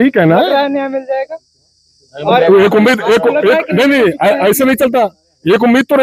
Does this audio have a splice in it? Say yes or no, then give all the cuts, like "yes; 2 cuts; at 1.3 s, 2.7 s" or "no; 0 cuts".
no; 0 cuts